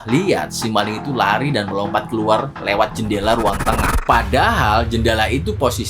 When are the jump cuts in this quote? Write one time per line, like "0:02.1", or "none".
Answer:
0:04.0

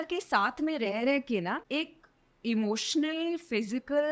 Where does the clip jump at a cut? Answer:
0:01.6

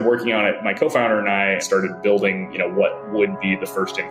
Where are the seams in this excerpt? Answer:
0:01.6

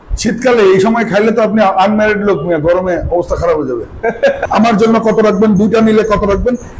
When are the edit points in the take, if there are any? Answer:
0:04.4

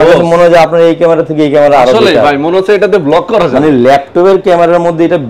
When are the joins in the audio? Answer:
none

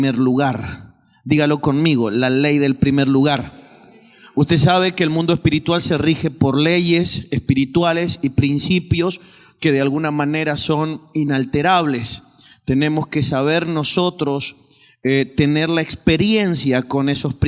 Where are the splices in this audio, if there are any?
0:09.7

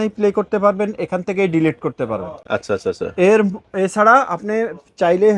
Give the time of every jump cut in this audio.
none

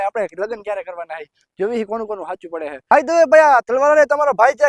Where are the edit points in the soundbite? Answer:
0:02.9

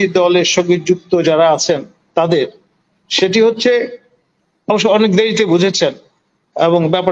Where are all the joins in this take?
none

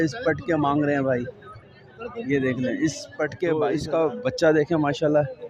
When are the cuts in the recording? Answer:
0:03.4

